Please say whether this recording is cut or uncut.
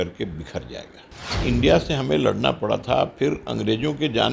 cut